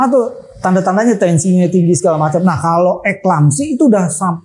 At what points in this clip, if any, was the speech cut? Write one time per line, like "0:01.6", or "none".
none